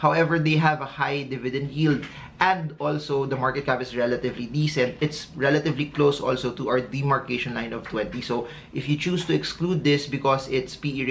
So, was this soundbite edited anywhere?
no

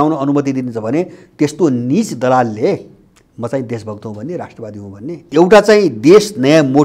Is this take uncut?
no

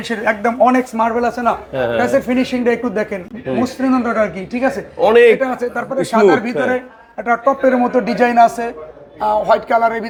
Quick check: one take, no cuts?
yes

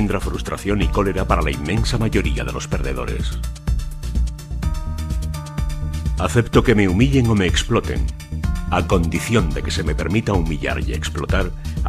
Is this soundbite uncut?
yes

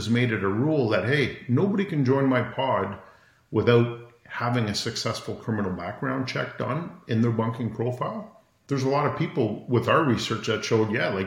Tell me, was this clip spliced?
no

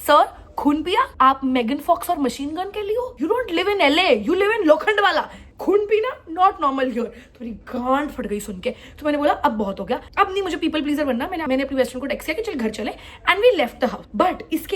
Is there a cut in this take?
no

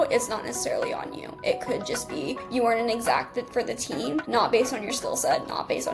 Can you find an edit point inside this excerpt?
no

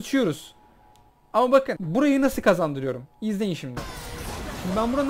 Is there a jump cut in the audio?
yes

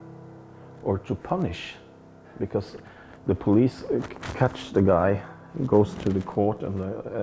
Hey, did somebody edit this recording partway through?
no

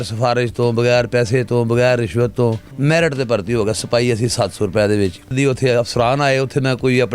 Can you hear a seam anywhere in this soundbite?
yes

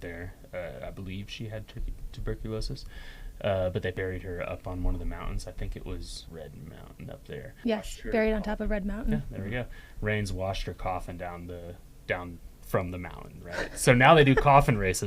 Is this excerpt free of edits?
no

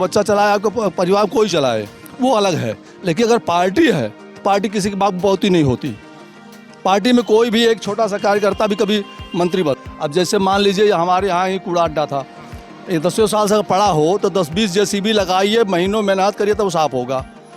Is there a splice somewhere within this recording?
yes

